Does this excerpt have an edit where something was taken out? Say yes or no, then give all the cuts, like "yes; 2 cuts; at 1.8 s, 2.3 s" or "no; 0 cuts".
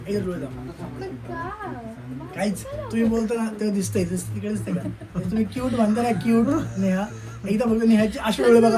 no; 0 cuts